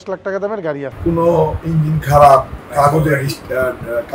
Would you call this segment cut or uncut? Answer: cut